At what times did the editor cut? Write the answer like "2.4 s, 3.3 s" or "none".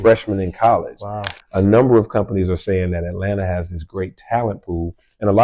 1.4 s

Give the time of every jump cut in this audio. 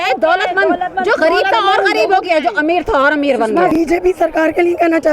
3.9 s

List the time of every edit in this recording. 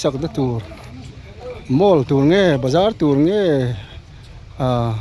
none

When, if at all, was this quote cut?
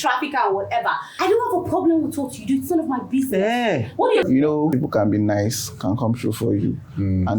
1.1 s, 4.3 s

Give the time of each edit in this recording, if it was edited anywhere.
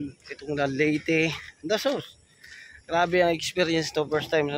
none

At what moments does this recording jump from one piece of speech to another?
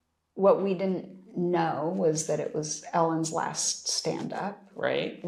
none

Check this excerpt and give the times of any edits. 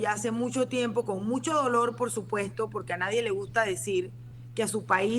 none

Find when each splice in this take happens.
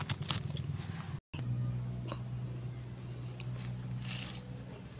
1.3 s

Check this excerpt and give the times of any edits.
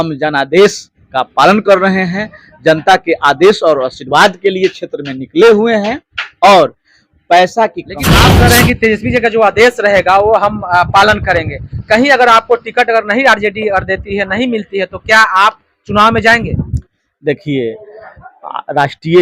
8.2 s

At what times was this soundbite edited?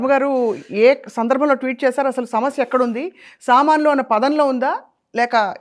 none

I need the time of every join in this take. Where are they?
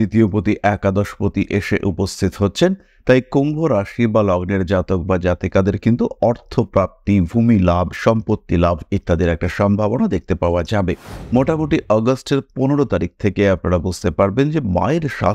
11.1 s

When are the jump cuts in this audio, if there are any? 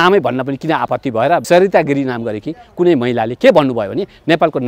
1.4 s

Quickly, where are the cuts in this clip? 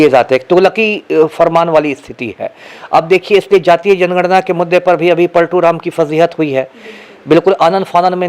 none

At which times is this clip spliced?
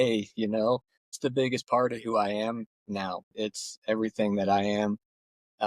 1.2 s, 3.3 s

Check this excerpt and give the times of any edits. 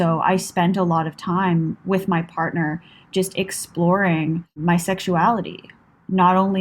1.8 s, 4.6 s

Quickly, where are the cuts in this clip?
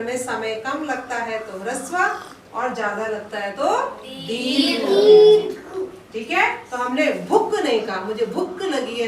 none

